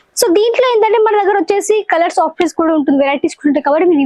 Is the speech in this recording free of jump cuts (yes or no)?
yes